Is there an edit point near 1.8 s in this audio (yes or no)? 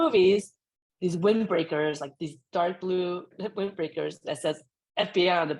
no